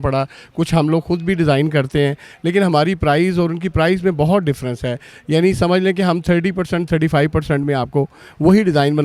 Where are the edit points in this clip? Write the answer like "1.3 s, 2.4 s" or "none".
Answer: none